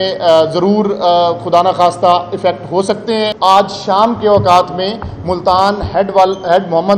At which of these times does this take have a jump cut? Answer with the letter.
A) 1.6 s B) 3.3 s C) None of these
B